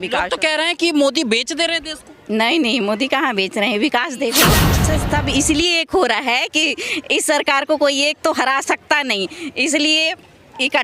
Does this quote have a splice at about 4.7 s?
yes; 1 cut; at 4.7 s

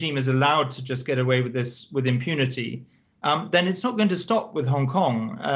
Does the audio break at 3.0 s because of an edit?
no; 0 cuts

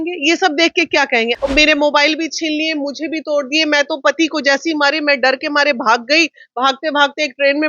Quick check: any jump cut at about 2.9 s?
no; 1 cut; at 1.4 s

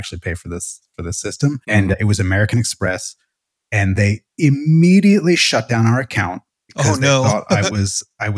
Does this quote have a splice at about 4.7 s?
no; 1 cut; at 1.6 s

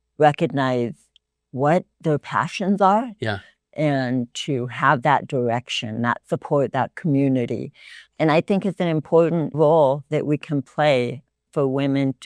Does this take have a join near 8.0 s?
no; 0 cuts

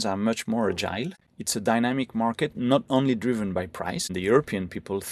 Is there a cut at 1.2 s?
yes; 2 cuts; at 1.2 s, 4.1 s

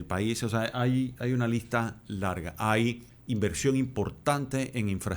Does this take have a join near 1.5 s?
no; 1 cut; at 3.1 s

